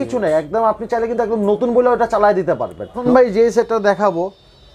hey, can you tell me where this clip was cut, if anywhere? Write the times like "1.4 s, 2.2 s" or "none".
3.0 s